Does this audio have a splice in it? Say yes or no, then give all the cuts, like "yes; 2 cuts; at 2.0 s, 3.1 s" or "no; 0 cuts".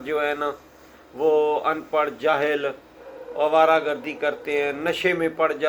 no; 0 cuts